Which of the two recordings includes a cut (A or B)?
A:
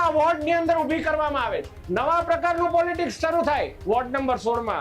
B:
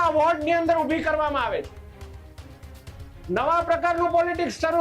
A